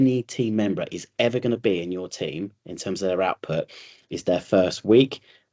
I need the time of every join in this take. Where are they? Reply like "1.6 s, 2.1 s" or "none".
none